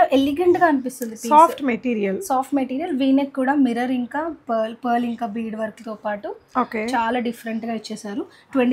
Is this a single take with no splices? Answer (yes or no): yes